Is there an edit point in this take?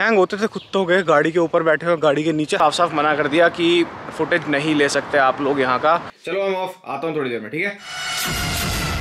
yes; 2 cuts; at 2.6 s, 6.2 s

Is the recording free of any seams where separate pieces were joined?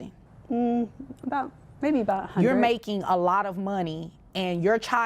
no; 1 cut; at 2.3 s

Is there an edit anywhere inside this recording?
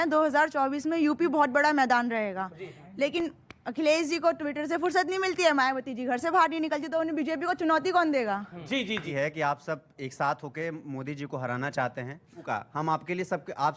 yes; 2 cuts; at 9.1 s, 12.4 s

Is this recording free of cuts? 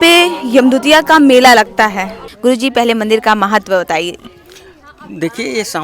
no; 1 cut; at 2.2 s

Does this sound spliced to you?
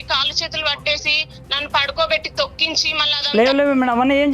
yes; 1 cut; at 3.0 s

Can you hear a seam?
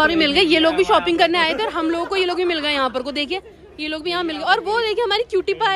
no; 0 cuts

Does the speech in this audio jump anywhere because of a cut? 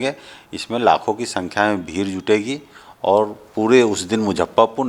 no; 0 cuts

